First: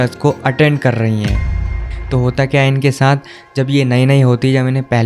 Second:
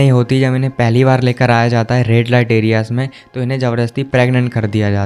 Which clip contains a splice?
first; 1 cut; at 1.7 s

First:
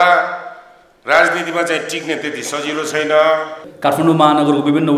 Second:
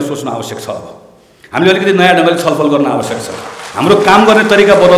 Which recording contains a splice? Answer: first; 1 cut; at 3.6 s

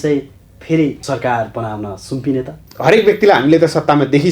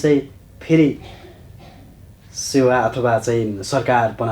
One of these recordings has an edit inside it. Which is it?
first; 2 cuts; at 1.0 s, 2.7 s

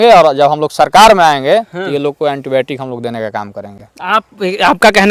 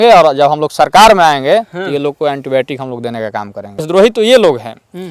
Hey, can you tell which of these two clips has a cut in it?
second; 1 cut; at 3.9 s

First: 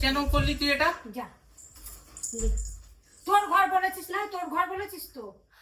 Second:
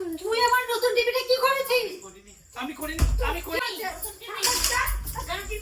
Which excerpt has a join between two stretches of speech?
second; 1 cut; at 3.6 s

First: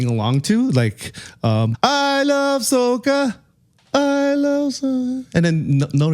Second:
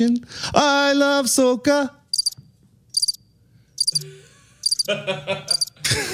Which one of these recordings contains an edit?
first; 1 cut; at 1.7 s

